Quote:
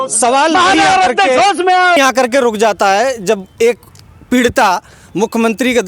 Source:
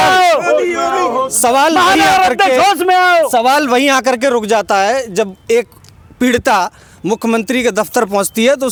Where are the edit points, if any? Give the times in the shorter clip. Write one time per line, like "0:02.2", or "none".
0:02.0